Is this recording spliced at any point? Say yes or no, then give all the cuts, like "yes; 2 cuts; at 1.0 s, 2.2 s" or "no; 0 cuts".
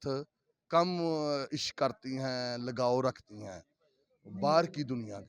no; 0 cuts